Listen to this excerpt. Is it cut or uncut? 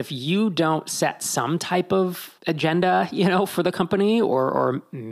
cut